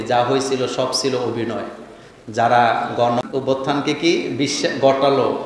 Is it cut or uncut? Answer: cut